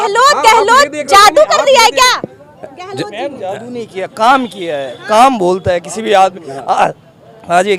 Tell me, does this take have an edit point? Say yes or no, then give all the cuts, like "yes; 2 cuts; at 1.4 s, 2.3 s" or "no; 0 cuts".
no; 0 cuts